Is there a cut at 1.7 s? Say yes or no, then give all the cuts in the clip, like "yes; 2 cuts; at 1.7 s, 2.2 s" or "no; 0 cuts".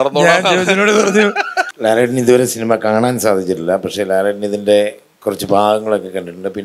yes; 1 cut; at 1.7 s